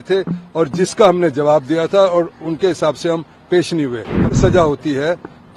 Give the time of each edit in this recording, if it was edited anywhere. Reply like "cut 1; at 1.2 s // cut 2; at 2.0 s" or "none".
cut 1; at 4.4 s